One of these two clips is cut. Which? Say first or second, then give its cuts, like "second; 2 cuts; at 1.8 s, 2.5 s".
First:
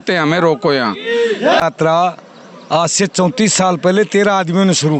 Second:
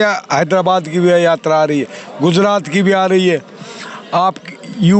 first; 1 cut; at 1.6 s